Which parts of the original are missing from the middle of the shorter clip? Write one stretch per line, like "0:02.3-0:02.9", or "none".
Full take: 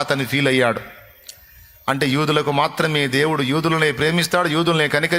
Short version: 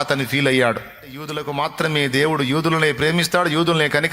0:01.4-0:02.4